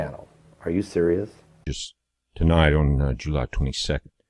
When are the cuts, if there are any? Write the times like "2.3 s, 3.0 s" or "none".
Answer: 1.3 s